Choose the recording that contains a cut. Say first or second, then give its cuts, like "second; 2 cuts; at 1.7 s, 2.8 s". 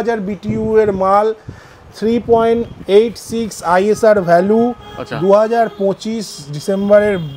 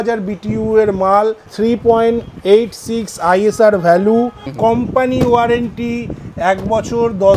second; 2 cuts; at 1.5 s, 4.4 s